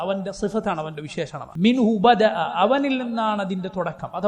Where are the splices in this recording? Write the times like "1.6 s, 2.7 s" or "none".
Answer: 1.4 s

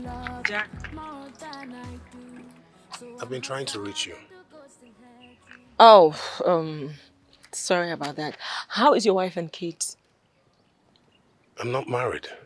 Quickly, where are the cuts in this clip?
none

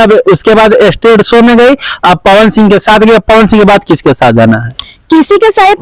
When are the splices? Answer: none

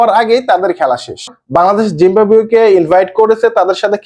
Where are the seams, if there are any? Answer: 1.4 s

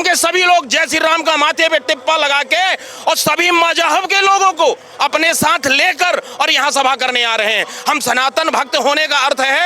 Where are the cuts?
none

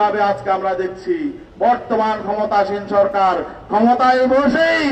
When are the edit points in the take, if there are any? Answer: none

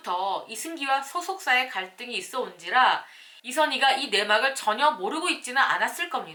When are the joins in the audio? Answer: none

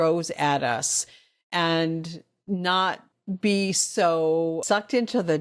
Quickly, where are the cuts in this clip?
3.1 s, 4.6 s

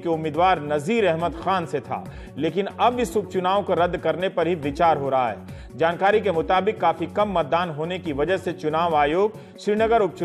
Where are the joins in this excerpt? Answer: 2.1 s

